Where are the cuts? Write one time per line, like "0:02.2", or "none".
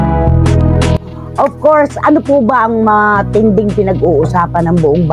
0:01.0